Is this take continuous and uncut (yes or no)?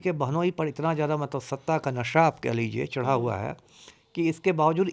yes